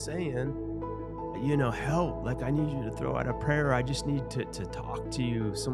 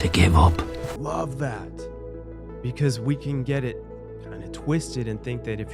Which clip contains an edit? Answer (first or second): second